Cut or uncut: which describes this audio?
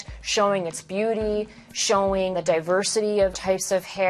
cut